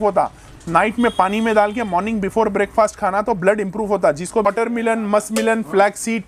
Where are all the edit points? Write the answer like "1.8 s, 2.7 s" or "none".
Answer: 4.5 s